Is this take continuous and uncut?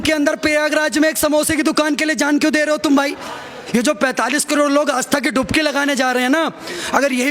no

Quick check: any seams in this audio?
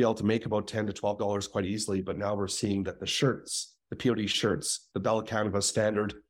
no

